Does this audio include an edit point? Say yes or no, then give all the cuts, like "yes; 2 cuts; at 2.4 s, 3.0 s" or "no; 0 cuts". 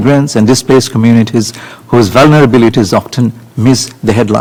no; 0 cuts